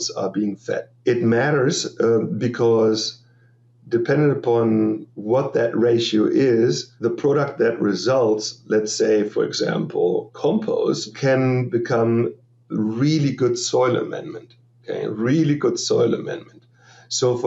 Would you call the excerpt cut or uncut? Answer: cut